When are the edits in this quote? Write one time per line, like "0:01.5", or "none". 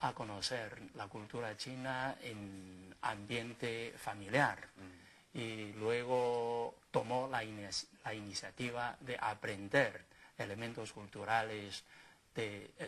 none